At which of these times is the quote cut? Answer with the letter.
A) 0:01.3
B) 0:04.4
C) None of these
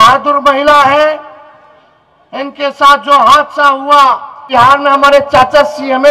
B